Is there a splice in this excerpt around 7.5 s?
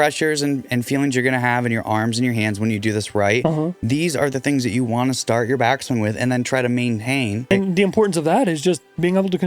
yes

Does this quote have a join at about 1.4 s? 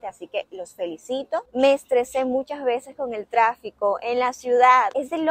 yes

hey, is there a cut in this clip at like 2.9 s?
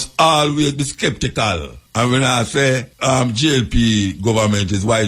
yes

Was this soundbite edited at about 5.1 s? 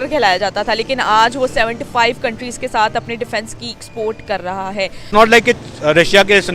yes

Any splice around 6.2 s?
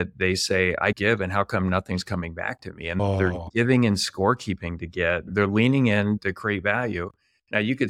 yes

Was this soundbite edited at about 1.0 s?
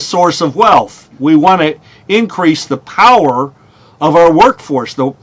yes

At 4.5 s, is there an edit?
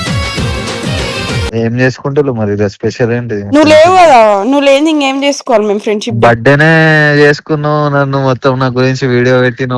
no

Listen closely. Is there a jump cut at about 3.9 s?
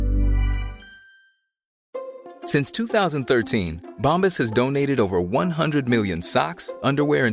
no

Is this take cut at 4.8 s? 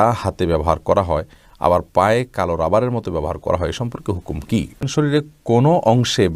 yes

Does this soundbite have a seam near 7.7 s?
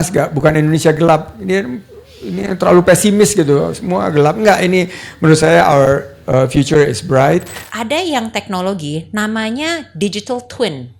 yes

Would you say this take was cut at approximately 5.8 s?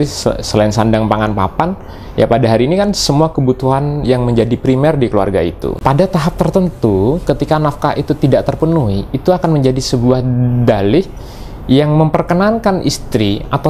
yes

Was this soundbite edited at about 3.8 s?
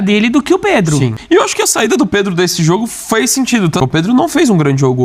yes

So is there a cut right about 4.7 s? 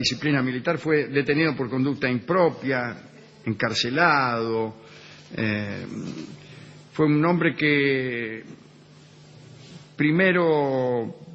no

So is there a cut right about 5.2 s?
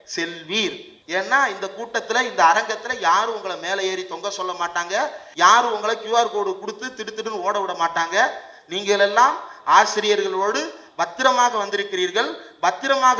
yes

